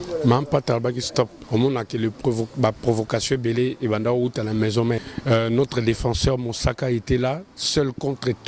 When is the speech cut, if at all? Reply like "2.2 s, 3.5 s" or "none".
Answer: 1.4 s, 5.1 s